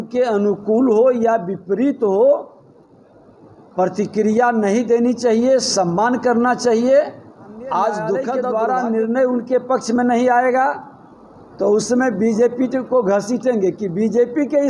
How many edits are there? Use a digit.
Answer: 1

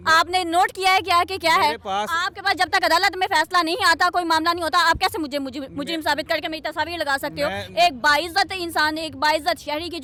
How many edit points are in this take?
0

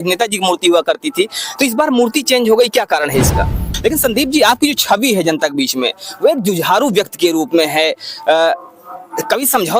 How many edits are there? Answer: 1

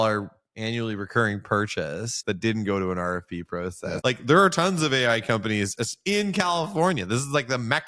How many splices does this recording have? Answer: 2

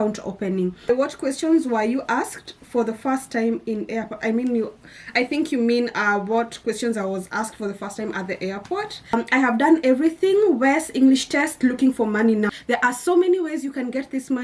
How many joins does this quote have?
3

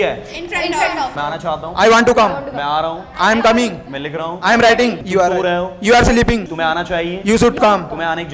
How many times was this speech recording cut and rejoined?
1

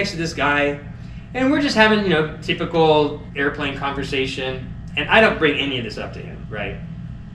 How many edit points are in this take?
0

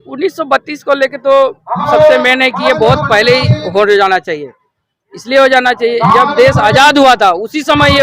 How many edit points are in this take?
0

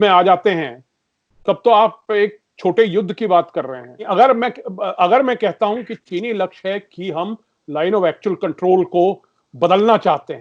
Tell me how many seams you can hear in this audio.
1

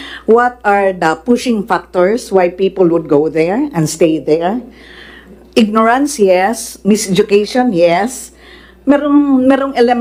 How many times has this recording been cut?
0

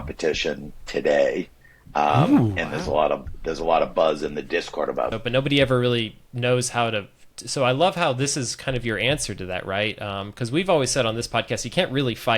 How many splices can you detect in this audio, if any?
1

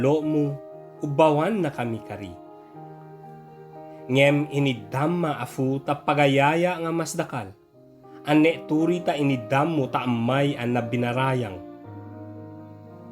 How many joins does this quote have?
3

